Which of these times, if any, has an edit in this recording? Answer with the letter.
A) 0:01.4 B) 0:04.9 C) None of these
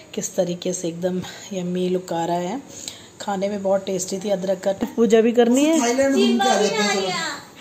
B